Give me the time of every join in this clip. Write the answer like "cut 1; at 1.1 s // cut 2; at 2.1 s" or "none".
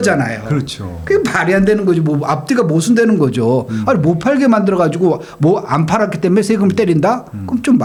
none